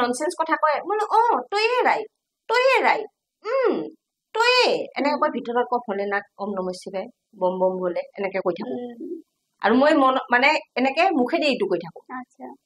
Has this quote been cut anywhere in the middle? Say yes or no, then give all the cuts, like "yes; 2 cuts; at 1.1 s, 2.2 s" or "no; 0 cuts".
no; 0 cuts